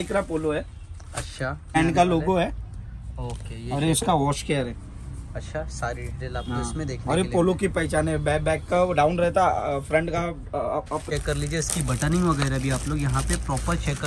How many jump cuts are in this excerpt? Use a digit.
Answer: 2